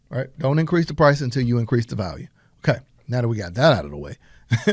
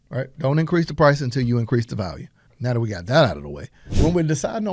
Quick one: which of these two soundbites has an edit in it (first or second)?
second